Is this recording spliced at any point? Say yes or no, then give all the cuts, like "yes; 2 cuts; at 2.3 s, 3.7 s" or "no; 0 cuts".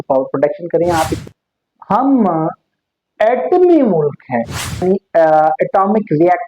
yes; 2 cuts; at 1.2 s, 4.8 s